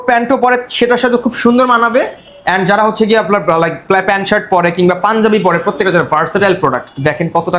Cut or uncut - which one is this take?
uncut